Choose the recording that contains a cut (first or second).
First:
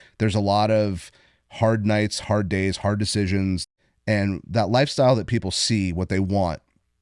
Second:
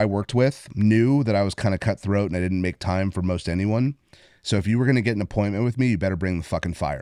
first